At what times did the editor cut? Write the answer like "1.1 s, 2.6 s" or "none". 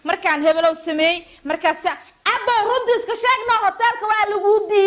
none